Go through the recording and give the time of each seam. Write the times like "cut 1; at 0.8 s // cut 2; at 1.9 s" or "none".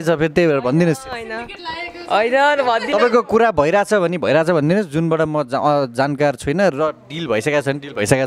none